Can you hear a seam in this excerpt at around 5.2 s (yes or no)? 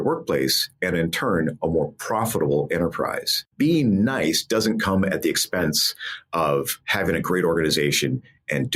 no